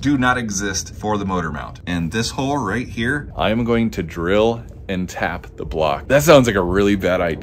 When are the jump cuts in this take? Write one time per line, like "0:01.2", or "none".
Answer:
0:01.7
0:03.3
0:06.0